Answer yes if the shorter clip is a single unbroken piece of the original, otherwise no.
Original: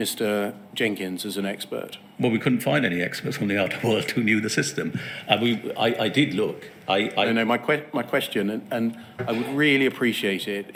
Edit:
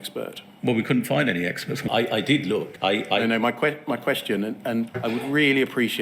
no